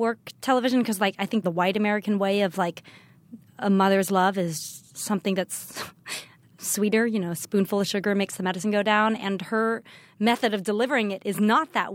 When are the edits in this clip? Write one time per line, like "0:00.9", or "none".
0:01.4
0:06.6